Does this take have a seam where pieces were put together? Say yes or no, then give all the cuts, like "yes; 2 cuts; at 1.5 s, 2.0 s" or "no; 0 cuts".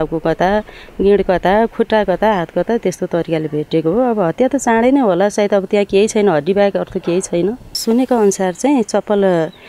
yes; 1 cut; at 7.8 s